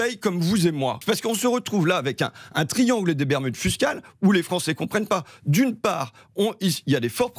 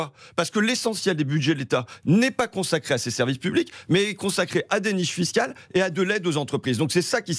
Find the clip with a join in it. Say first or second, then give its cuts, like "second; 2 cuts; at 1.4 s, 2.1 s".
first; 1 cut; at 1.0 s